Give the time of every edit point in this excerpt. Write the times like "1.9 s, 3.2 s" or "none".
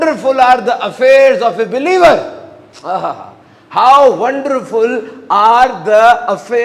none

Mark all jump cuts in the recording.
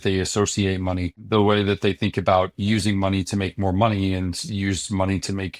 1.1 s

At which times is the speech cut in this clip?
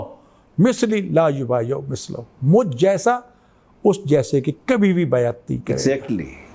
none

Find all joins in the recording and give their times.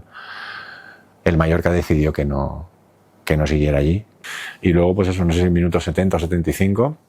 4.2 s

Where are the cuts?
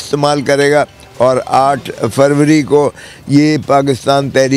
none

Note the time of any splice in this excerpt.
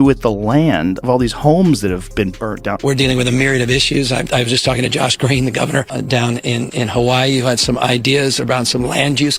none

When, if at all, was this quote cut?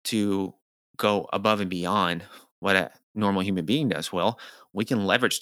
none

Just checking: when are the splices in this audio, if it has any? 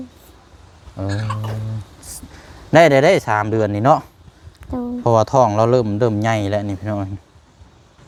none

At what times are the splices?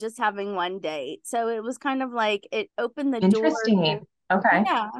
none

